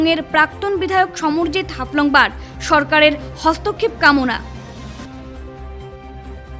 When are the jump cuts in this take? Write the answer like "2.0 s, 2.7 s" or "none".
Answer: 5.0 s